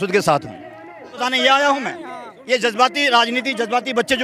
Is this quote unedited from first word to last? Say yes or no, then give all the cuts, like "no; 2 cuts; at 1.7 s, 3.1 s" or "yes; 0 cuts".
no; 1 cut; at 1.2 s